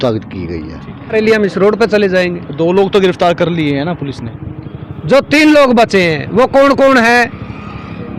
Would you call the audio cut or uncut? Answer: cut